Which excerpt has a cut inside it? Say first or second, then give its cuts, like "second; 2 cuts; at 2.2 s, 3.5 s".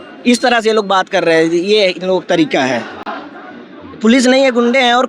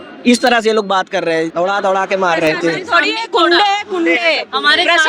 second; 1 cut; at 1.4 s